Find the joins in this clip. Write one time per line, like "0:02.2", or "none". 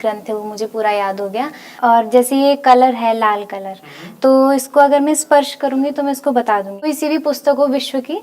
0:01.6
0:06.9